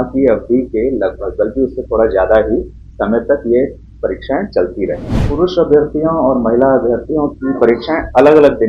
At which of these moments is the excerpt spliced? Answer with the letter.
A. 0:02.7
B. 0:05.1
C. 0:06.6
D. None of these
B